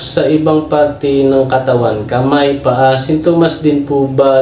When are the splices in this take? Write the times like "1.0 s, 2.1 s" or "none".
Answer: none

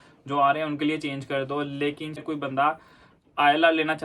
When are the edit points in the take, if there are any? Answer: 2.2 s

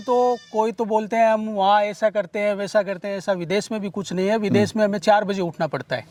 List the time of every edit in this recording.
none

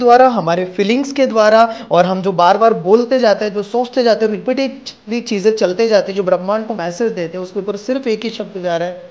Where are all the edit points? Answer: none

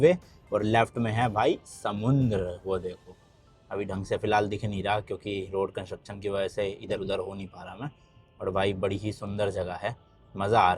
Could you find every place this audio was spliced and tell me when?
none

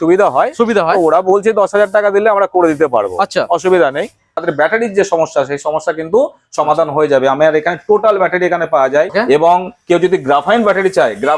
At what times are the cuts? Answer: 4.4 s, 9.1 s

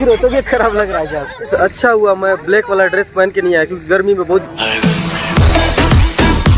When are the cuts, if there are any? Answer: 1.3 s, 4.4 s

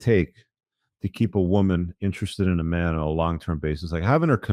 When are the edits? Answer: none

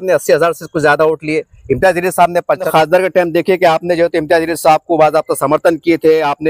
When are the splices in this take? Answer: 2.7 s

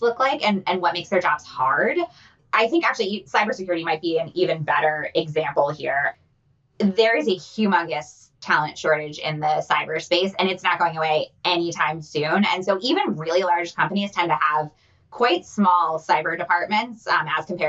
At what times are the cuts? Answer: 2.3 s, 6.1 s

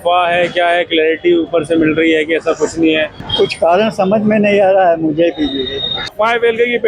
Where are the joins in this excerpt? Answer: 3.2 s, 6.1 s

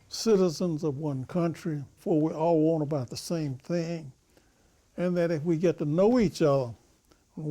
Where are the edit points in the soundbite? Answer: 1.9 s

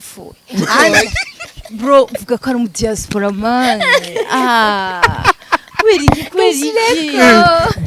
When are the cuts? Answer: none

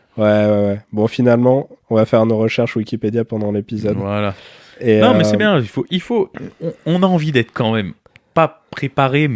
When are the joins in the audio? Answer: 1.8 s

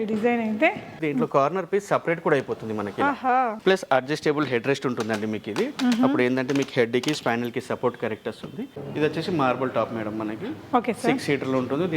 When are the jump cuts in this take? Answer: 1.0 s, 3.6 s, 8.7 s

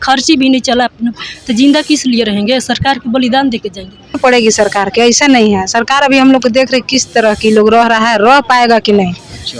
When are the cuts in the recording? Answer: 4.1 s

